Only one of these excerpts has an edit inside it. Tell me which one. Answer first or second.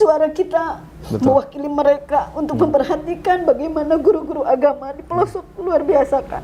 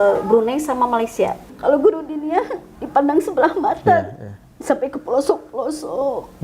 second